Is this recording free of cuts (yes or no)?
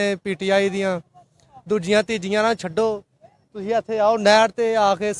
yes